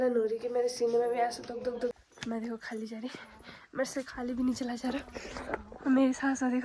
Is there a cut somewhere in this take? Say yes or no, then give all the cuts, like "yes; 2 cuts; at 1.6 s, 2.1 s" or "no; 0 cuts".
yes; 1 cut; at 1.9 s